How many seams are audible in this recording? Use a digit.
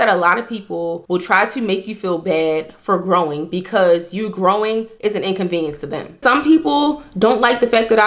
2